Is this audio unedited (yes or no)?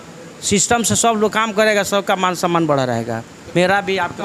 yes